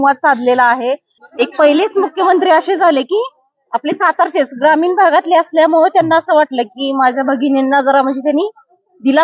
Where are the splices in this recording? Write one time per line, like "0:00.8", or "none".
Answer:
0:01.1